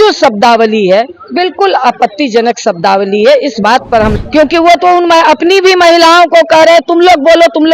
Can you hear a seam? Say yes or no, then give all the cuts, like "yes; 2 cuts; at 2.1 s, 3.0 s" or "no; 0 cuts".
yes; 1 cut; at 4.1 s